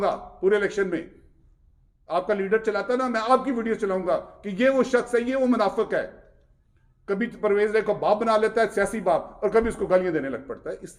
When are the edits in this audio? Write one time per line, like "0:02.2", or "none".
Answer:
none